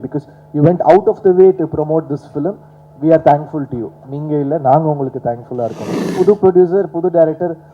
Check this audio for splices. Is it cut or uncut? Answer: cut